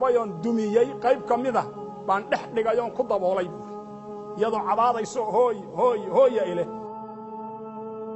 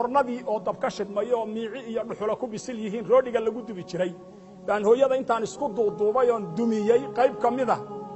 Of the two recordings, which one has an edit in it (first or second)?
first